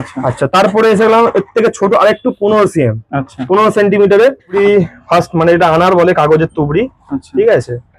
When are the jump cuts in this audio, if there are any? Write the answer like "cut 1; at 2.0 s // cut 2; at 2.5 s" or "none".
cut 1; at 4.5 s